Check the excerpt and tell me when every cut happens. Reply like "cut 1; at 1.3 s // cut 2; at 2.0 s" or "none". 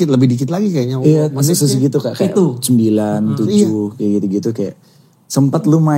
none